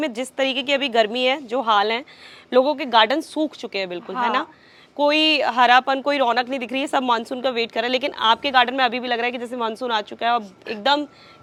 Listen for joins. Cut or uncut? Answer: uncut